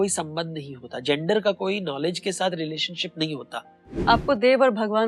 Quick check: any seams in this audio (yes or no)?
yes